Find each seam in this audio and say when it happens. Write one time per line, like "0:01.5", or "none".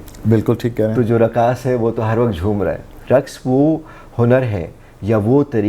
0:03.0